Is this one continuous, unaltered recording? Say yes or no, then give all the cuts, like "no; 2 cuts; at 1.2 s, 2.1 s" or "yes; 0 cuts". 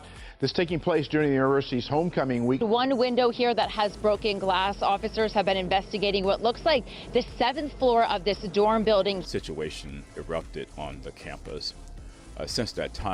no; 1 cut; at 9.3 s